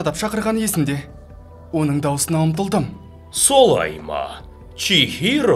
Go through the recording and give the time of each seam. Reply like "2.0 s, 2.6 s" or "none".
none